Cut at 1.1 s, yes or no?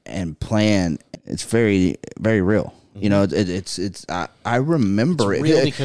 yes